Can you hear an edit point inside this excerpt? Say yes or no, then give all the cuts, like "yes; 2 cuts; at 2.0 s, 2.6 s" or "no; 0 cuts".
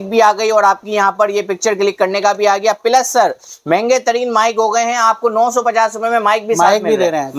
no; 0 cuts